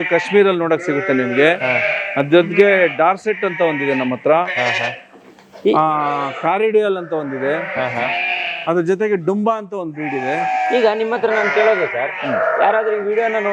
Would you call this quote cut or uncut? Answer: uncut